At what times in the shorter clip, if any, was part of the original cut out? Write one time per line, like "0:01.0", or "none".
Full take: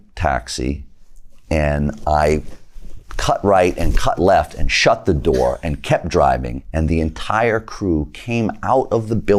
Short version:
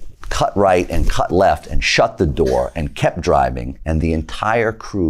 none